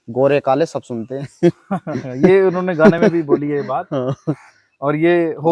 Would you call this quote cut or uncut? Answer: uncut